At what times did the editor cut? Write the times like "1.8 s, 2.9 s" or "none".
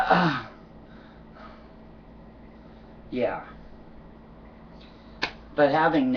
4.4 s